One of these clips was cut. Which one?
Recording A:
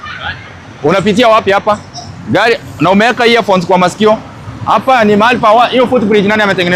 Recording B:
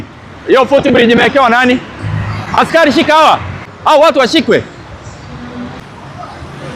B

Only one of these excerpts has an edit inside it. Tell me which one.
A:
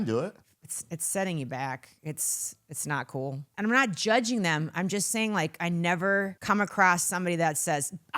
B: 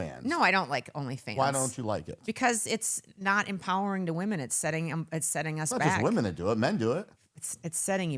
A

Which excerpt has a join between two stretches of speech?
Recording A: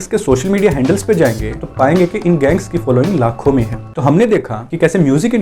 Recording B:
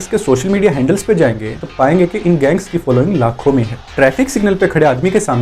B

